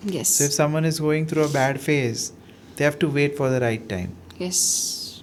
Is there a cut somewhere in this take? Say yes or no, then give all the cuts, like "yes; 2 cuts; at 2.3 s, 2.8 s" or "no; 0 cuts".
no; 0 cuts